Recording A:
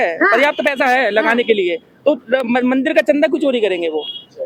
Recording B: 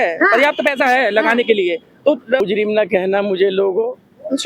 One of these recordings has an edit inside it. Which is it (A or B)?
B